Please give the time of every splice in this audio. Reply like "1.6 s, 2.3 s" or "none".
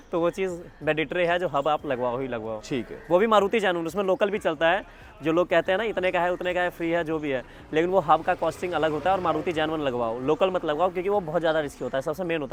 none